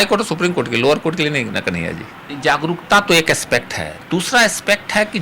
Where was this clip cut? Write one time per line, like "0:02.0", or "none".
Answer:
0:02.2